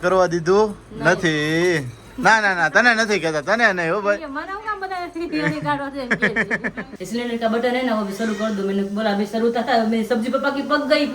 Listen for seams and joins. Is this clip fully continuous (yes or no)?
no